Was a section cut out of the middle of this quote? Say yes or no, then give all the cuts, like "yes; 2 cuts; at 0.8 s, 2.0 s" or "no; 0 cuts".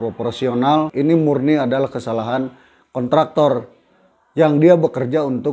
yes; 1 cut; at 0.9 s